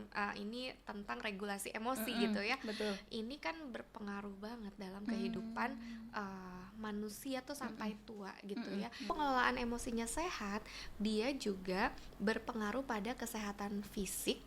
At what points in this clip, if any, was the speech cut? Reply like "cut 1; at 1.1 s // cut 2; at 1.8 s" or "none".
cut 1; at 9.1 s